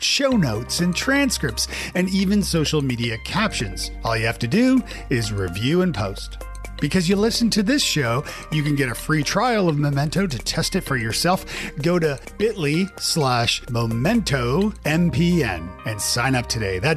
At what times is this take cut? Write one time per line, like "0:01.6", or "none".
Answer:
none